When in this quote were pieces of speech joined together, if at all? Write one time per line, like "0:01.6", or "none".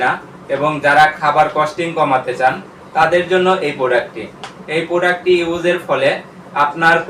none